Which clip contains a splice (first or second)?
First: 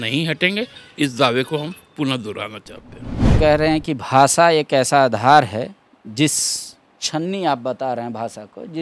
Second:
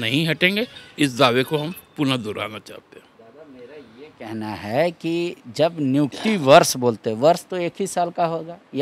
first